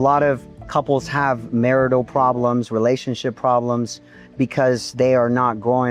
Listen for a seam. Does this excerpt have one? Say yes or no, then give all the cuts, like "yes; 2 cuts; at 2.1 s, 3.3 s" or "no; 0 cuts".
no; 0 cuts